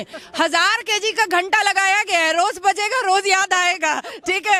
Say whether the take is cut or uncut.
uncut